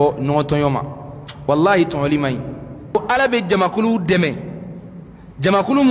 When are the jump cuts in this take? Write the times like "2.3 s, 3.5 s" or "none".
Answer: 2.9 s